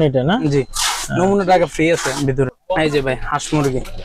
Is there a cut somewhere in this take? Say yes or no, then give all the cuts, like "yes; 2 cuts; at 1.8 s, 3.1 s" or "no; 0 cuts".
yes; 1 cut; at 2.6 s